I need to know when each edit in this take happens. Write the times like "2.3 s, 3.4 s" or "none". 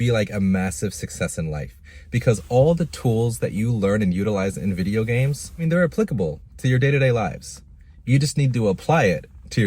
5.7 s